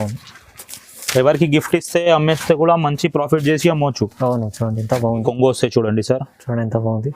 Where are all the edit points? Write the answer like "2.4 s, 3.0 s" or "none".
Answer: 5.2 s